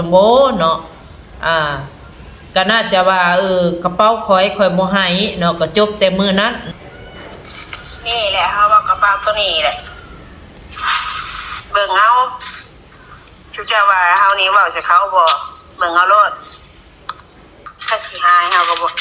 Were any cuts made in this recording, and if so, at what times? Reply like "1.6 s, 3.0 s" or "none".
6.6 s, 17.7 s